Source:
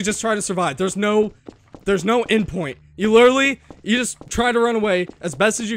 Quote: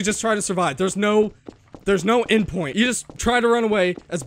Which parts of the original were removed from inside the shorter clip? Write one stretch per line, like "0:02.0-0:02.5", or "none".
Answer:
0:02.6-0:03.7